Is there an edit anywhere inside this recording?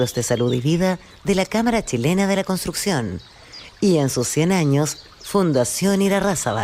yes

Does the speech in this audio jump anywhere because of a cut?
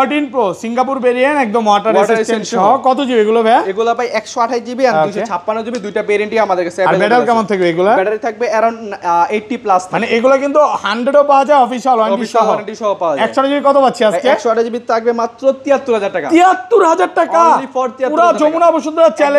no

